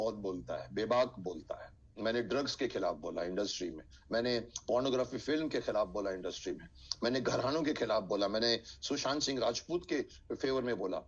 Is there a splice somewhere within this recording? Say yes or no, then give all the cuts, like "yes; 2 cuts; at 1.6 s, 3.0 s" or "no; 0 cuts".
no; 0 cuts